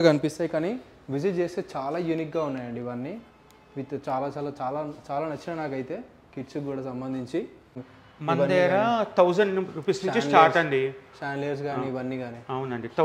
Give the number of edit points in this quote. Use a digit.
1